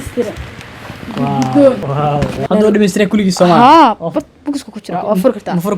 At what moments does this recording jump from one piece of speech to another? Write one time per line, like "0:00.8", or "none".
0:01.9